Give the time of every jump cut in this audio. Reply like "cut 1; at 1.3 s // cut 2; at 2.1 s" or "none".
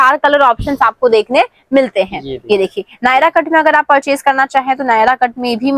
none